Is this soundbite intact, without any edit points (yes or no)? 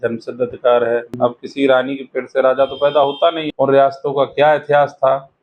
no